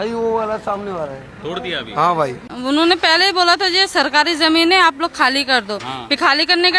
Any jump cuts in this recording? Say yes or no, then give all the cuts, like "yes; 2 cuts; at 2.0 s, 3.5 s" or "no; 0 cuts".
yes; 1 cut; at 2.5 s